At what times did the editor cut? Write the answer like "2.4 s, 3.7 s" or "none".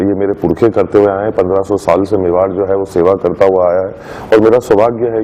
none